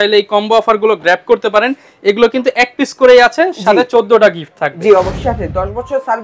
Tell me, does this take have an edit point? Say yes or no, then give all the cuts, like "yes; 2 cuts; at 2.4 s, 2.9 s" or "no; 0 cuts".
yes; 1 cut; at 5.2 s